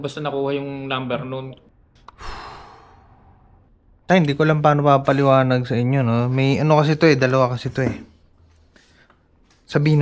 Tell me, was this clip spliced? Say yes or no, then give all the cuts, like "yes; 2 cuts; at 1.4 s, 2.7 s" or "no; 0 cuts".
yes; 1 cut; at 1.6 s